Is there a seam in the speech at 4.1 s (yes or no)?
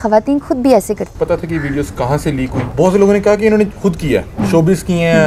no